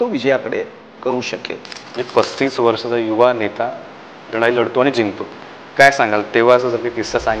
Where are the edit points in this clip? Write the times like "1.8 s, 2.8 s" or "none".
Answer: 1.8 s, 4.2 s